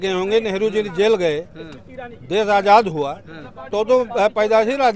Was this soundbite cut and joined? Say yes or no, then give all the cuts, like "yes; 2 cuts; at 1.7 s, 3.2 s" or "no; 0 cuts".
no; 0 cuts